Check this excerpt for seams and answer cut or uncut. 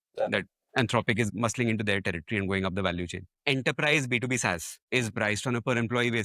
cut